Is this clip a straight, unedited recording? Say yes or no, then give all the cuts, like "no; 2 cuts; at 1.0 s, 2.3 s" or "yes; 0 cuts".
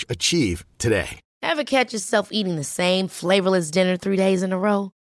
no; 1 cut; at 1.2 s